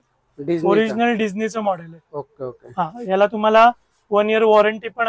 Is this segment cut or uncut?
uncut